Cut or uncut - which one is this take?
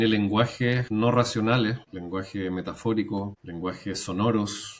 cut